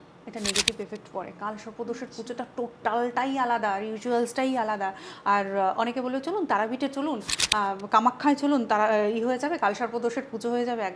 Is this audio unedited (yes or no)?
yes